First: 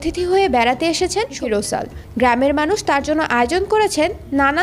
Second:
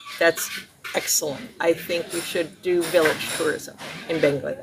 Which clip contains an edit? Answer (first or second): first